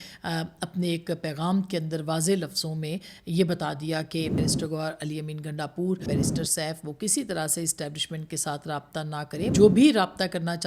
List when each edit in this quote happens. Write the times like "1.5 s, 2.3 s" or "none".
4.4 s, 6.1 s, 9.5 s